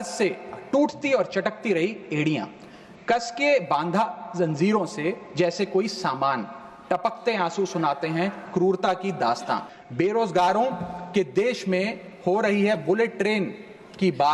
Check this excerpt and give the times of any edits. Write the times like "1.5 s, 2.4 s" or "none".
9.8 s